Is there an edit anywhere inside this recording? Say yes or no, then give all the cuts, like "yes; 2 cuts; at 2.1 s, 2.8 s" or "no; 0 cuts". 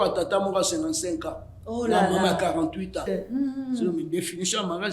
yes; 1 cut; at 3.1 s